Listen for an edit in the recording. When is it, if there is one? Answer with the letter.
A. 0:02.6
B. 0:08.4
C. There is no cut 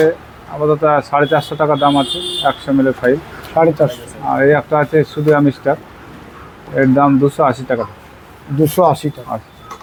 C